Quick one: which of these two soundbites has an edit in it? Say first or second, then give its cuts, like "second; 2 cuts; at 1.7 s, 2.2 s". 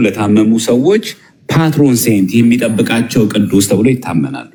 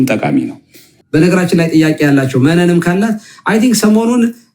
second; 1 cut; at 1.0 s